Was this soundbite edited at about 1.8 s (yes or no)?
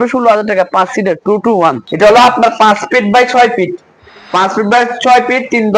yes